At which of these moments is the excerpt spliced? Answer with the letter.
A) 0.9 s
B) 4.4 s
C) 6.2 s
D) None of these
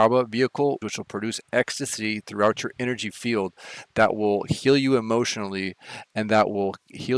A